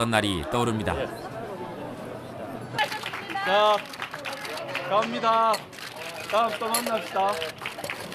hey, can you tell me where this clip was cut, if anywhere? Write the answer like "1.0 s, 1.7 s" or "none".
5.6 s